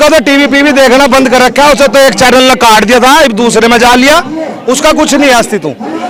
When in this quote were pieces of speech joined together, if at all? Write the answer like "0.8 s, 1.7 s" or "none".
none